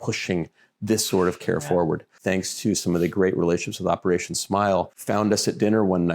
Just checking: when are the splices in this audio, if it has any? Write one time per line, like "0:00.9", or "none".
0:02.2
0:05.0